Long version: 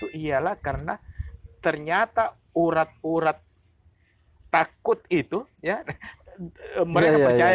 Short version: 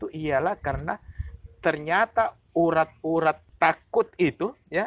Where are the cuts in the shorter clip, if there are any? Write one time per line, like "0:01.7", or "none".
0:03.5